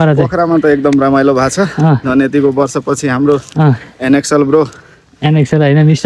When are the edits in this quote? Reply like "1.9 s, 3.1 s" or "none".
none

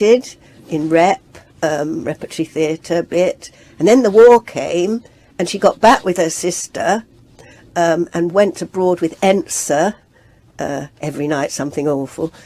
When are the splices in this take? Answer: none

